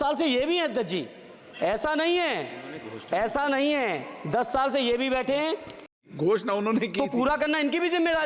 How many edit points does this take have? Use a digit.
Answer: 1